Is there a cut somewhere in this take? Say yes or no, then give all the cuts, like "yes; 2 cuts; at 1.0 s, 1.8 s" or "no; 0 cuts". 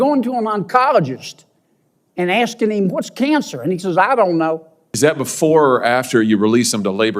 yes; 1 cut; at 4.9 s